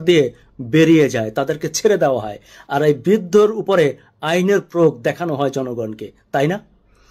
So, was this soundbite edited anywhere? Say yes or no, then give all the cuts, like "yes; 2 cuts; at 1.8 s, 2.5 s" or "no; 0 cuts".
no; 0 cuts